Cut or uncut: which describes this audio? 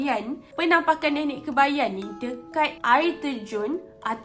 uncut